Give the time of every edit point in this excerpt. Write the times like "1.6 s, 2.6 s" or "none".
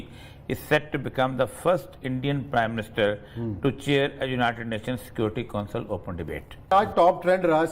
6.7 s

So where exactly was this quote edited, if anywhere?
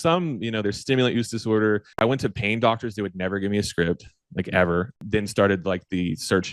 2.0 s, 5.0 s

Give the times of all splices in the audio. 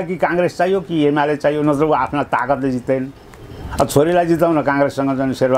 none

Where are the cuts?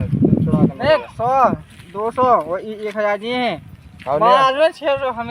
none

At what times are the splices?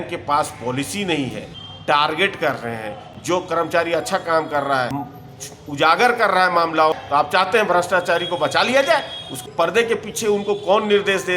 1.5 s, 5.0 s, 6.9 s, 9.3 s

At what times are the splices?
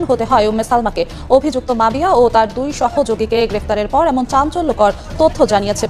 none

